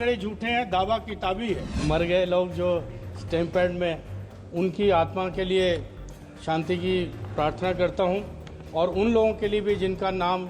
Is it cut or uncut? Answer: cut